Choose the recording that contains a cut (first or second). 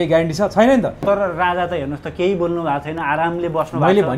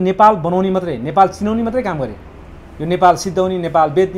first